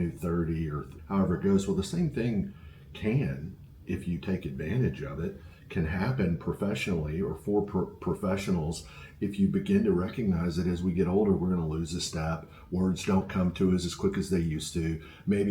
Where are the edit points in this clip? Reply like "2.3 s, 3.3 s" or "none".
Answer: 0.9 s